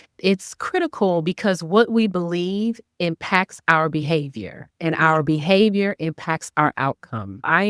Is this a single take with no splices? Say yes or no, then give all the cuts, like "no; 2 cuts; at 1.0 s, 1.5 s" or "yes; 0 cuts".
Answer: yes; 0 cuts